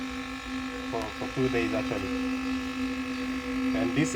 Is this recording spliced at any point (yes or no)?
no